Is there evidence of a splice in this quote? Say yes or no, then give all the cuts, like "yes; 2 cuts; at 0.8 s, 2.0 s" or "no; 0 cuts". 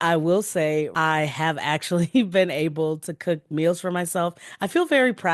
yes; 1 cut; at 0.9 s